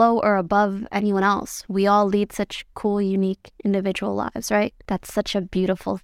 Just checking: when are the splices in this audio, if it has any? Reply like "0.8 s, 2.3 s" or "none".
4.8 s

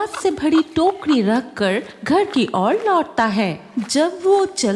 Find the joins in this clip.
none

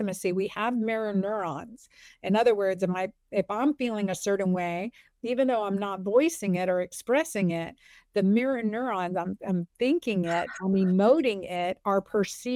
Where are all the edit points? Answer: none

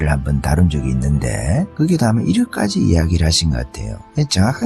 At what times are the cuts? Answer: 1.7 s

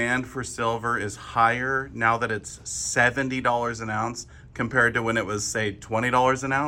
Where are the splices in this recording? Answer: none

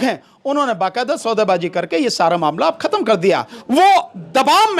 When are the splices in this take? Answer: 3.5 s

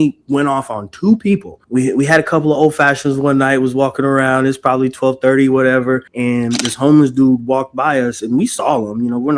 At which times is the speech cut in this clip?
1.5 s, 6.1 s

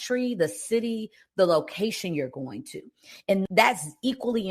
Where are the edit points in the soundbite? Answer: none

